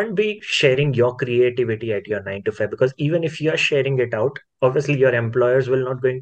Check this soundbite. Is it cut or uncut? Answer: uncut